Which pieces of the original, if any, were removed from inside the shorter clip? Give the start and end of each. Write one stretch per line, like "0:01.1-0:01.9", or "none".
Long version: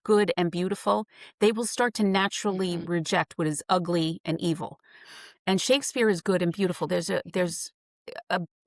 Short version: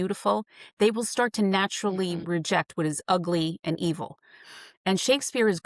none